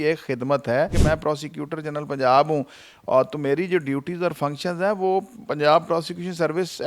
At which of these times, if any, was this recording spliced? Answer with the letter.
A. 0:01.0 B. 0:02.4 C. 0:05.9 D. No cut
A